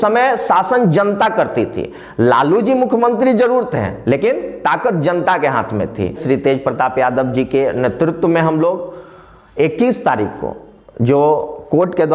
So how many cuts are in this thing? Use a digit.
1